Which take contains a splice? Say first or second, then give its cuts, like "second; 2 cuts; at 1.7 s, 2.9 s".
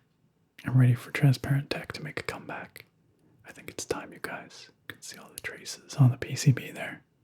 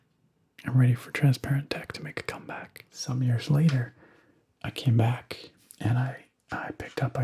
second; 1 cut; at 3.0 s